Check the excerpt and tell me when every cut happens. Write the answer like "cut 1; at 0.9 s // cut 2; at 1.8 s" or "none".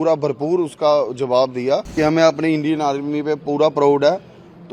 cut 1; at 1.9 s